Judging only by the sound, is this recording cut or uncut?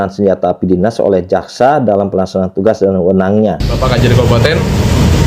cut